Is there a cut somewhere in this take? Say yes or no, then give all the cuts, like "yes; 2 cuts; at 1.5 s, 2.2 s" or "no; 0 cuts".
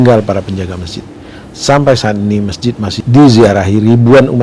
yes; 1 cut; at 3.0 s